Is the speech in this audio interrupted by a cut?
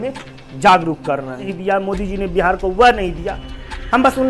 yes; 1 cut; at 1.5 s

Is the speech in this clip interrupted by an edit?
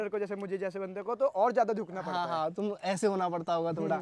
no; 0 cuts

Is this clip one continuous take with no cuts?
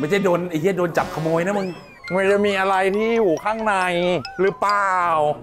no; 1 cut; at 2.0 s

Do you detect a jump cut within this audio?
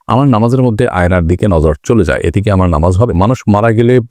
yes; 1 cut; at 3.1 s

